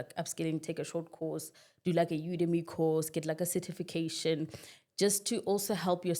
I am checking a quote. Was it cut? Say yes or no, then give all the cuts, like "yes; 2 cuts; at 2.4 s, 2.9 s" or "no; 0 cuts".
no; 0 cuts